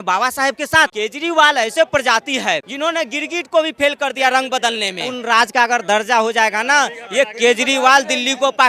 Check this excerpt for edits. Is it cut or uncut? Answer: cut